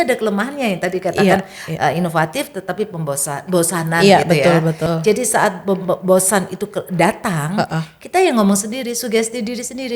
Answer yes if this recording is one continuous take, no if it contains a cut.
no